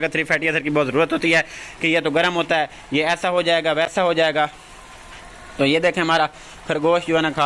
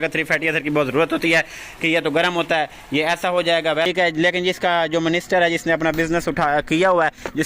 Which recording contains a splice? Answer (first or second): second